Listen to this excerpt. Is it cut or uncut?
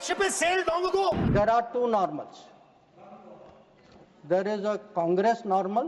cut